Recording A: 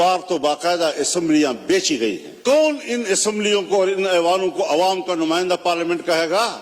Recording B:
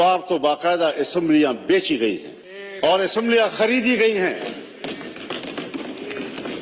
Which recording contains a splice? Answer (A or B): A